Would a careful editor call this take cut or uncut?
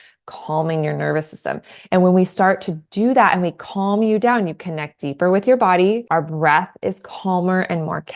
cut